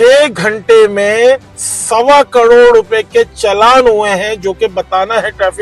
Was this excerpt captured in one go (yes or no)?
yes